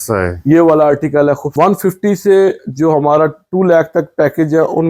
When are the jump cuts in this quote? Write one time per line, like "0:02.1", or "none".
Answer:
0:01.5